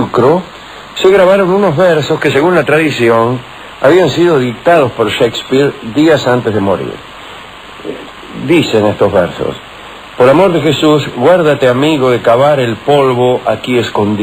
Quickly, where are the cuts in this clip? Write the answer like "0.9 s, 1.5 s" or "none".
2.1 s